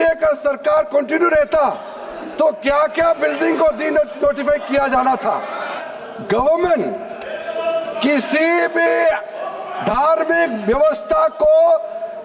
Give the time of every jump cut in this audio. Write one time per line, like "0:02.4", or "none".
0:05.8